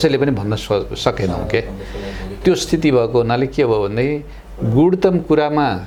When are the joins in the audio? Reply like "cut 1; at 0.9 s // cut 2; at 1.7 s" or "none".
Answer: none